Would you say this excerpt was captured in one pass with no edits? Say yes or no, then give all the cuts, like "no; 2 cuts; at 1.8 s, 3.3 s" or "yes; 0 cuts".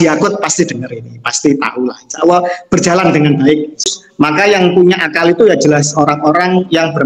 no; 1 cut; at 4.0 s